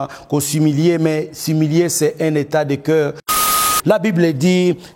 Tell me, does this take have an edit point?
yes; 1 cut; at 3.5 s

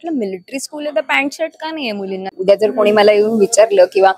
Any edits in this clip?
yes; 1 cut; at 2.3 s

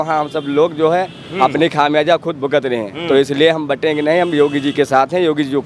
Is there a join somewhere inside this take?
no; 0 cuts

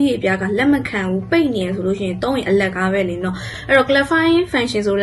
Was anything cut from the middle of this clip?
yes; 1 cut; at 3.5 s

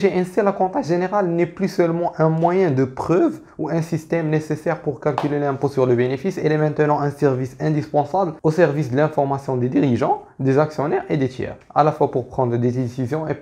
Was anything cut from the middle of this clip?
no; 0 cuts

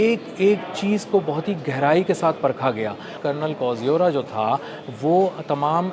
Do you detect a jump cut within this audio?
yes; 1 cut; at 3.1 s

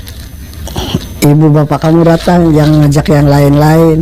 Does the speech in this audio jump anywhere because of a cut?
no; 0 cuts

